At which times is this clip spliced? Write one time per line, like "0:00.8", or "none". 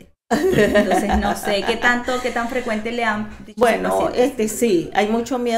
none